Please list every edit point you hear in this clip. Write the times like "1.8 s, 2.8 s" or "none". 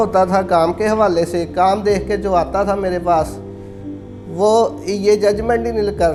none